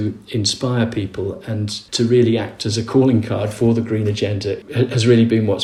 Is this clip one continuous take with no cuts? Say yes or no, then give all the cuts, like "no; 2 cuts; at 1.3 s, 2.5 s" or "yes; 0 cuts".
yes; 0 cuts